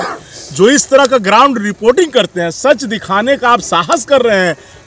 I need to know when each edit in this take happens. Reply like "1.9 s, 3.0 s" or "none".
none